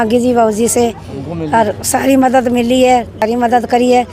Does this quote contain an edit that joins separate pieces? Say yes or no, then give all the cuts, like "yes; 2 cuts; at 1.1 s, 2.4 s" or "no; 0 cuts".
yes; 1 cut; at 3.2 s